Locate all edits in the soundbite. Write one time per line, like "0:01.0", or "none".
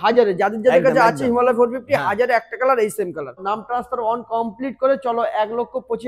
0:03.5